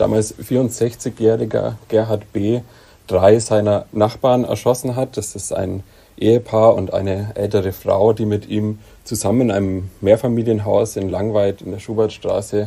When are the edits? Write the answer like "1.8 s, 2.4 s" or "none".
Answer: none